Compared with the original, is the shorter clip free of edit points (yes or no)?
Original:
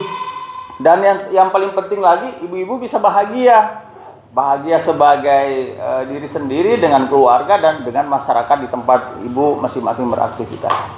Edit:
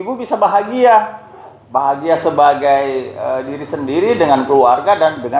yes